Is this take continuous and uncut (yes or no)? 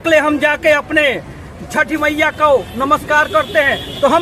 yes